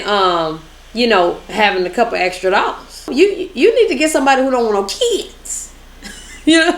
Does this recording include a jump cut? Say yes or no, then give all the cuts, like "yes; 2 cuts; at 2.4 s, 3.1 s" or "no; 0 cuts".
yes; 1 cut; at 3.1 s